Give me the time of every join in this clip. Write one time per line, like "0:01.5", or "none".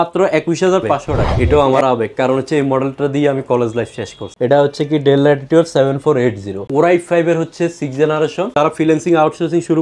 0:01.3
0:04.2
0:06.7
0:08.5